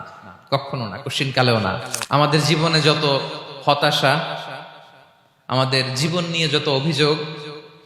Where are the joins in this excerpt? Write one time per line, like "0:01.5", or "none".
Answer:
0:01.9